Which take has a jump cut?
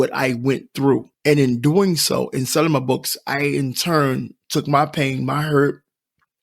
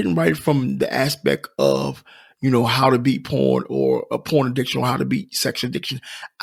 first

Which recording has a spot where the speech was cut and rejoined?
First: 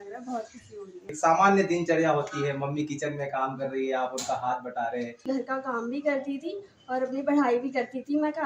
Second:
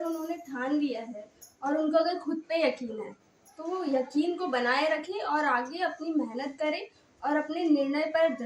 first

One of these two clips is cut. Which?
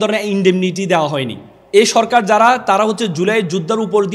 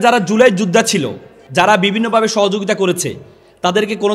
first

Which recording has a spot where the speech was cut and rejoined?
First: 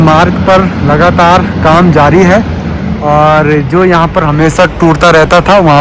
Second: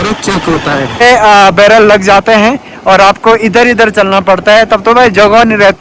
second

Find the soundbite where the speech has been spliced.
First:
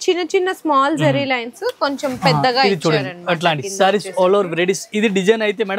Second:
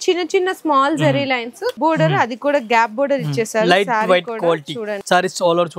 second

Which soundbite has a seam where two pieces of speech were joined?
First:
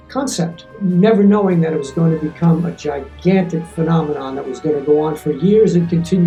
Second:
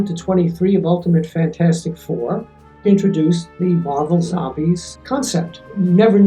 second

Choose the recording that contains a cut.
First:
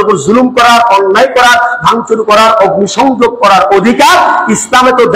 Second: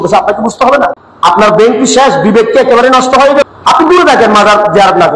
second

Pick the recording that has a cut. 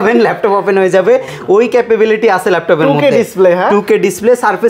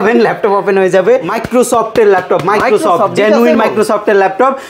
second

